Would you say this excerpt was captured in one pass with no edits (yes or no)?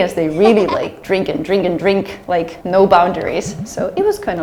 yes